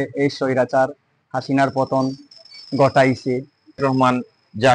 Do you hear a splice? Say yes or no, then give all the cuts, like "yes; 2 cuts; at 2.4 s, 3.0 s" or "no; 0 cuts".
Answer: yes; 1 cut; at 3.8 s